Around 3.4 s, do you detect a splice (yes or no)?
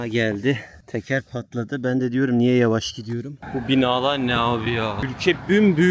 yes